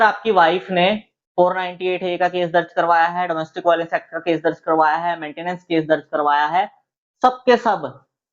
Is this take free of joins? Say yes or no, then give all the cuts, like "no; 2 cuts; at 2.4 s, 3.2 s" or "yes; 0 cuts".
yes; 0 cuts